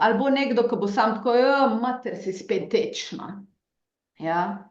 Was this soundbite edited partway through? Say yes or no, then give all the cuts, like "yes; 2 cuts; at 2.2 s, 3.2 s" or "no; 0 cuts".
no; 0 cuts